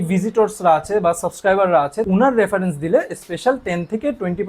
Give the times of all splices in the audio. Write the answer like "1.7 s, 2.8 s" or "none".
2.0 s